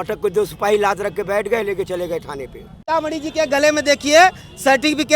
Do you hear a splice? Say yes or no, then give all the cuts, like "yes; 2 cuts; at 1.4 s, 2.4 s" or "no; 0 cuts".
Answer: yes; 1 cut; at 2.8 s